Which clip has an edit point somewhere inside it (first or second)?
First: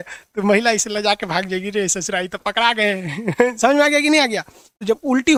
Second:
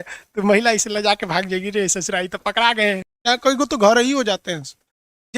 second